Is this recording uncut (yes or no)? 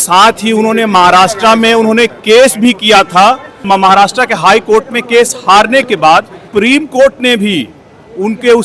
no